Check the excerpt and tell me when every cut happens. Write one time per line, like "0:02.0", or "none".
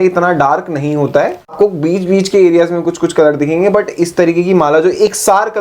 0:01.5